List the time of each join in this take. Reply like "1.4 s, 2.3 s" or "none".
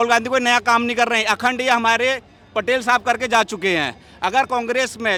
none